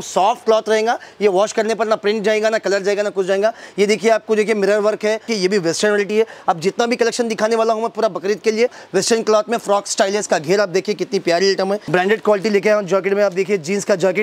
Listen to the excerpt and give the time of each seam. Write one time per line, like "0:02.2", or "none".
0:05.3
0:08.8
0:11.8